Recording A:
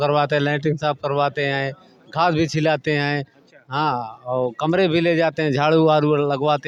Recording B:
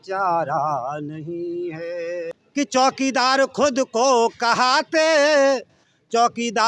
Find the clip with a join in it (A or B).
B